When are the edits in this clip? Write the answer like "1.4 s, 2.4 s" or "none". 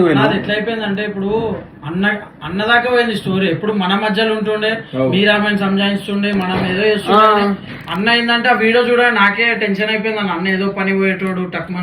none

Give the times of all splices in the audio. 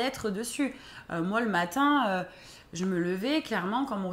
none

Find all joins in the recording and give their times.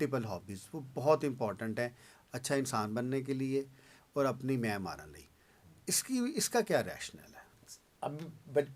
none

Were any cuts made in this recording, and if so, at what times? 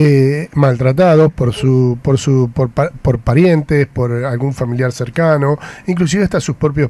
none

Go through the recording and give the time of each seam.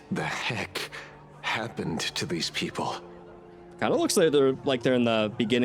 3.7 s

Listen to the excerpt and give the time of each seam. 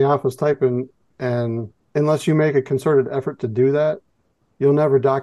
1.8 s

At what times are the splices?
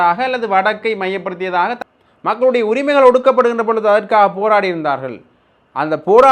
1.8 s

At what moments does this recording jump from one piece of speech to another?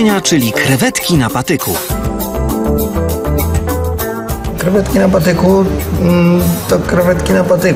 none

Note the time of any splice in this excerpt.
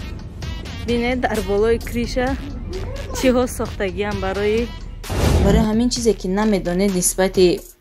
5.4 s

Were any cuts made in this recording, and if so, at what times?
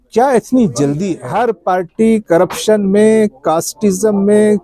1.2 s

